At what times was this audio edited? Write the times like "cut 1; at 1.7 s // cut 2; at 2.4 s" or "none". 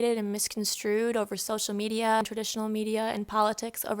cut 1; at 2.2 s